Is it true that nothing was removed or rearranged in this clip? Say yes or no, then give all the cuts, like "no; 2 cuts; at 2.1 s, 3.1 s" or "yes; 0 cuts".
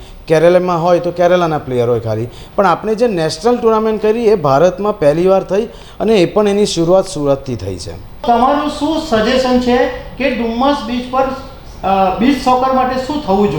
yes; 0 cuts